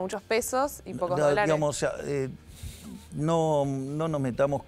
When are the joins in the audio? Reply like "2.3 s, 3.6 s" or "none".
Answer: none